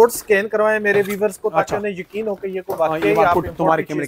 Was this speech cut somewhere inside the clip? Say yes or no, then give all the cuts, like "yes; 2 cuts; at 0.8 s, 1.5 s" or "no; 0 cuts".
no; 0 cuts